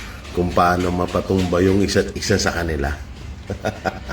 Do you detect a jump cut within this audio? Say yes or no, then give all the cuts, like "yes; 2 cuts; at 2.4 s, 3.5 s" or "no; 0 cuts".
yes; 1 cut; at 3.0 s